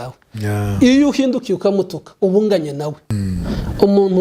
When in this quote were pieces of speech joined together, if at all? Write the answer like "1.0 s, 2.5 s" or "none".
3.0 s